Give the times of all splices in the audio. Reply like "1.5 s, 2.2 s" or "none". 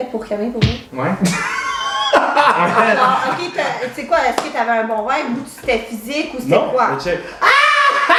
none